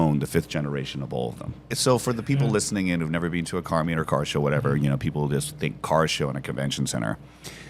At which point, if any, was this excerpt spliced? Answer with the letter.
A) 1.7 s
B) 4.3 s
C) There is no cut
A